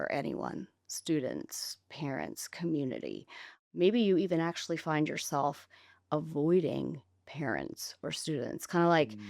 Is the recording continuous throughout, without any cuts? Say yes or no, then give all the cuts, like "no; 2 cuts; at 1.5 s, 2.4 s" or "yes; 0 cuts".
no; 1 cut; at 3.6 s